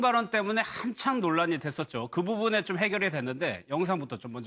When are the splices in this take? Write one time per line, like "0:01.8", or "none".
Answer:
0:01.8